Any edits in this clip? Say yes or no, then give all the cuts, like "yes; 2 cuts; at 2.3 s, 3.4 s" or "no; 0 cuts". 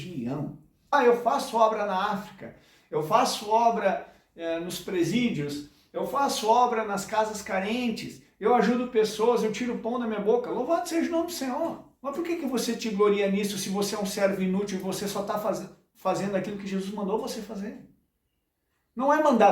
yes; 1 cut; at 0.9 s